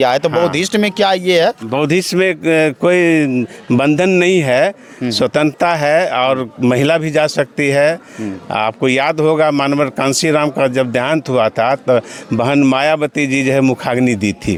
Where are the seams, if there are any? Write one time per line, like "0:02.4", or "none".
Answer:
none